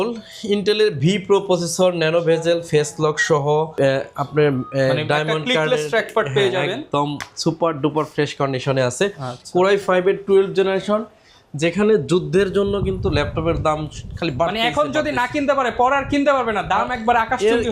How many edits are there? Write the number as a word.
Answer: zero